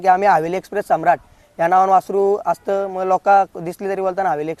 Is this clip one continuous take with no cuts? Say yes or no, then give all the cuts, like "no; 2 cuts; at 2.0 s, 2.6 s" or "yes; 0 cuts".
yes; 0 cuts